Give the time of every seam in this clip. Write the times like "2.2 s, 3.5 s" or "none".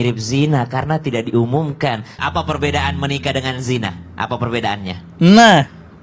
2.2 s